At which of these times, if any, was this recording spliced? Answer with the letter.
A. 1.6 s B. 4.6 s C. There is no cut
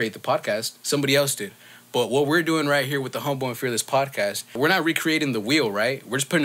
B